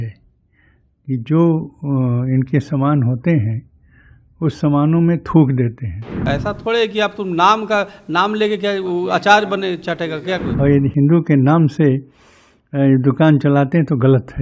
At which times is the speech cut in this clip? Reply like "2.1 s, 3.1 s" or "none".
6.2 s, 10.5 s